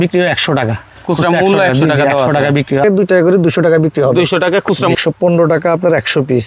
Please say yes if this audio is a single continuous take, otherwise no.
no